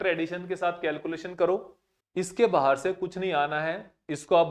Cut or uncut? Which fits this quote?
cut